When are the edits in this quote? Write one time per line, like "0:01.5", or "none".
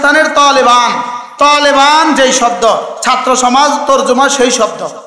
none